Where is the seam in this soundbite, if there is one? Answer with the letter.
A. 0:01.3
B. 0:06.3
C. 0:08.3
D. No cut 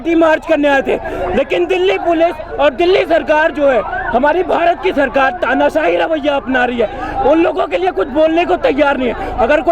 D